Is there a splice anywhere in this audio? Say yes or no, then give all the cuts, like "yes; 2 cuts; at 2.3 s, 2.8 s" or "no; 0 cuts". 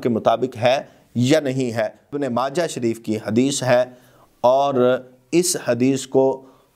yes; 1 cut; at 2.0 s